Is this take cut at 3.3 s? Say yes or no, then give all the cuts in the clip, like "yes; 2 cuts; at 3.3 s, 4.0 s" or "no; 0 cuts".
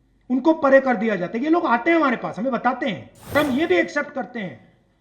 yes; 1 cut; at 3.3 s